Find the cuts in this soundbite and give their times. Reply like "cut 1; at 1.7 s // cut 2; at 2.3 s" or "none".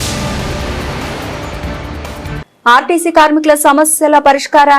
cut 1; at 2.4 s

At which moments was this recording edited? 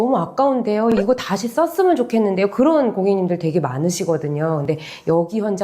none

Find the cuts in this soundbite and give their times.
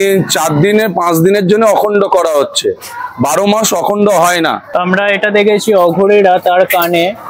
cut 1; at 4.6 s

